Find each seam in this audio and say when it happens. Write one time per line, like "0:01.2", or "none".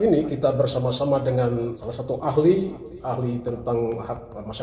0:01.8